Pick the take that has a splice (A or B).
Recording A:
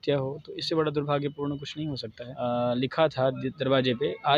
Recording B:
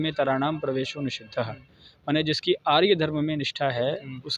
A